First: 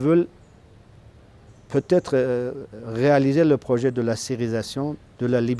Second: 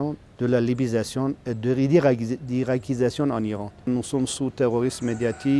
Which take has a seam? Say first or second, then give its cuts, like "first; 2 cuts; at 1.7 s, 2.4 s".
second; 1 cut; at 3.9 s